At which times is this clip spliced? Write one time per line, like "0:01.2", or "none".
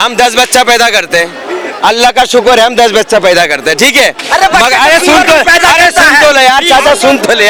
none